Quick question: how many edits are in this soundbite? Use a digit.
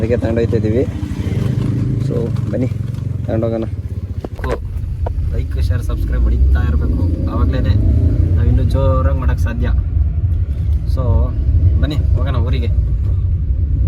1